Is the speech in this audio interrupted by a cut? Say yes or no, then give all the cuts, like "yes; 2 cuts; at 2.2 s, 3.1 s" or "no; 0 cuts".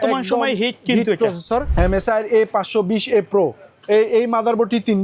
yes; 1 cut; at 1.7 s